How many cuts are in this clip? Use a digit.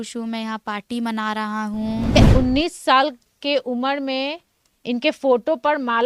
1